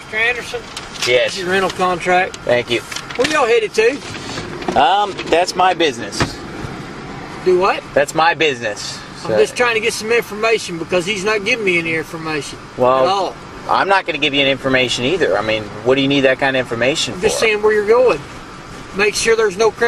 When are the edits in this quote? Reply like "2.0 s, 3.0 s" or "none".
none